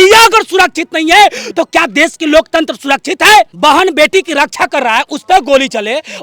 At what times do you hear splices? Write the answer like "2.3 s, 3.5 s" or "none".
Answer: 3.5 s